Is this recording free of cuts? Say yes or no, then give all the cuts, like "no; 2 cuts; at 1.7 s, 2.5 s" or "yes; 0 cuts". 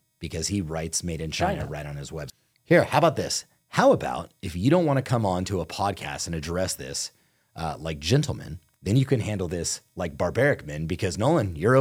no; 1 cut; at 2.2 s